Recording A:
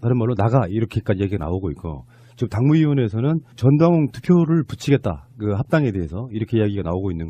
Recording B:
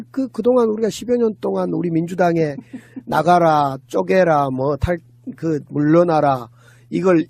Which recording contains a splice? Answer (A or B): B